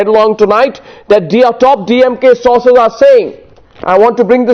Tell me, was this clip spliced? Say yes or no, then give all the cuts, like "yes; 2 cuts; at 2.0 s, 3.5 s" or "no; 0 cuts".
no; 0 cuts